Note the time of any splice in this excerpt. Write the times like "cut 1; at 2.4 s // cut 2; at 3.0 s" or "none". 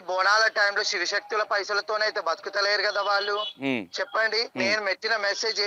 cut 1; at 3.5 s // cut 2; at 4.5 s